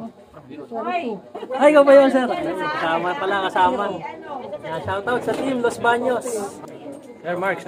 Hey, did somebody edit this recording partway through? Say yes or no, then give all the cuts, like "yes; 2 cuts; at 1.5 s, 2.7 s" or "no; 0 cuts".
yes; 1 cut; at 6.6 s